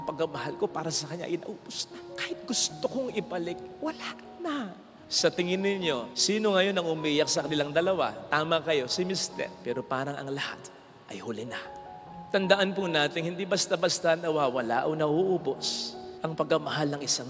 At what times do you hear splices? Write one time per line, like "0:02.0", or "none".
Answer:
none